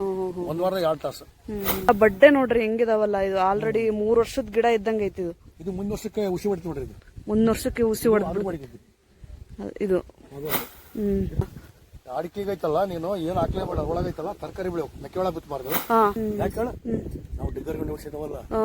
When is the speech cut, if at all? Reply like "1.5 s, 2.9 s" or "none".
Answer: 1.9 s, 11.4 s, 16.2 s